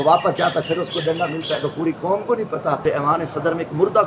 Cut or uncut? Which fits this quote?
cut